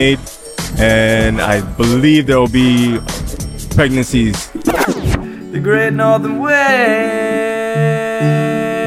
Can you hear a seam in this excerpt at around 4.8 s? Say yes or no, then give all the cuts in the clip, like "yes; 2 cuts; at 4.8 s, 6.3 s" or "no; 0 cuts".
yes; 1 cut; at 4.8 s